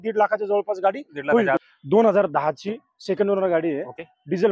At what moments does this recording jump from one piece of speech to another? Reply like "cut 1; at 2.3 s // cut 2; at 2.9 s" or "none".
cut 1; at 1.6 s

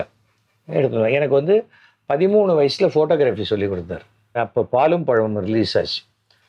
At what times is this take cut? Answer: cut 1; at 4.4 s

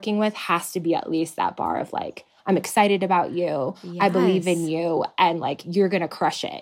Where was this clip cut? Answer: none

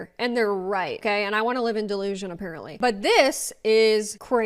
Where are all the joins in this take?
cut 1; at 2.6 s

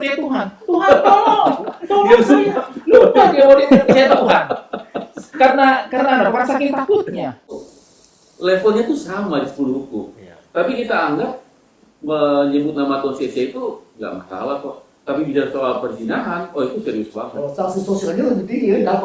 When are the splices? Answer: cut 1; at 7.7 s

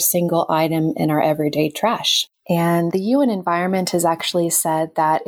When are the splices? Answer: cut 1; at 2.9 s

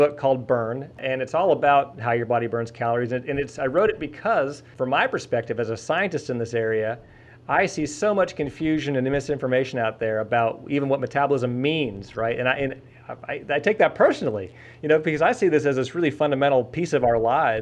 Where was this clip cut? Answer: cut 1; at 1.0 s // cut 2; at 4.7 s

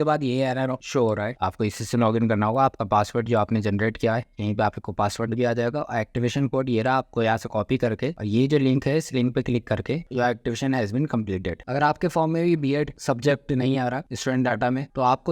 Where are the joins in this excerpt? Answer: cut 1; at 1.3 s // cut 2; at 10.1 s // cut 3; at 11.6 s

